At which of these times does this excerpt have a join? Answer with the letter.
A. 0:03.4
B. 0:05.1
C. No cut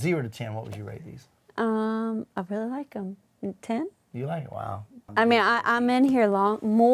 B